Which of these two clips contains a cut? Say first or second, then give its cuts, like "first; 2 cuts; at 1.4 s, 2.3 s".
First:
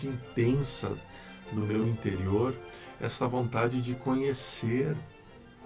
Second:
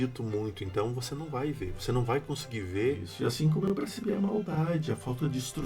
second; 1 cut; at 3.1 s